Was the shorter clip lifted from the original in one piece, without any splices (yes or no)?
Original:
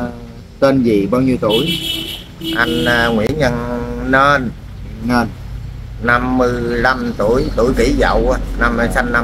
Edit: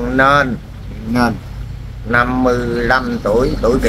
yes